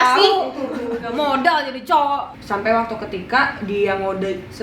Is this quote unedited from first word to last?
no; 1 cut; at 2.3 s

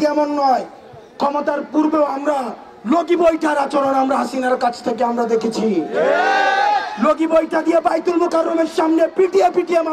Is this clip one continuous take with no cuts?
yes; 0 cuts

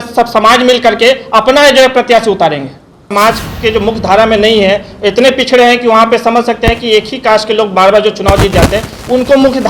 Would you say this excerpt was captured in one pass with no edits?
no; 1 cut; at 3.1 s

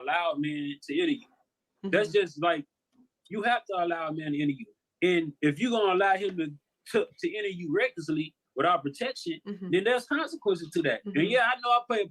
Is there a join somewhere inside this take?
no; 0 cuts

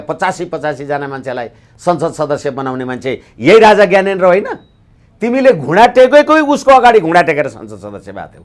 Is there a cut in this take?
no; 0 cuts

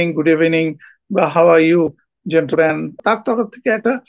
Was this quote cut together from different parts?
yes; 1 cut; at 3.0 s

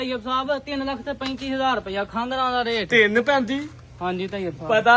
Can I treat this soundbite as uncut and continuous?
yes; 0 cuts

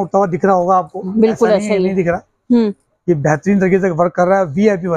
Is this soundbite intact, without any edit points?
yes; 0 cuts

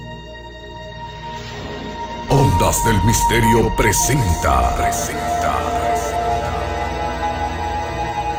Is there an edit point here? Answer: no; 0 cuts

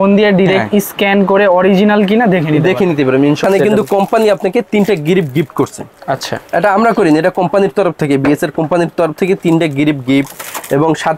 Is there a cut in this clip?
yes; 1 cut; at 3.4 s

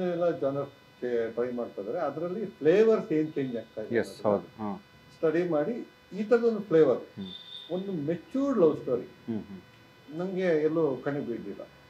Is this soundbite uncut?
yes; 0 cuts

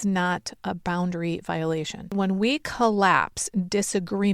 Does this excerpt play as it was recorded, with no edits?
no; 1 cut; at 2.1 s

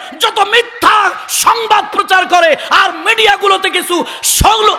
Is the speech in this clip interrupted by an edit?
no; 0 cuts

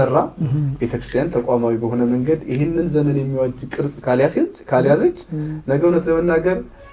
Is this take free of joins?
yes; 0 cuts

